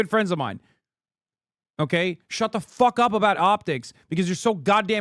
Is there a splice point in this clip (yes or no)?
no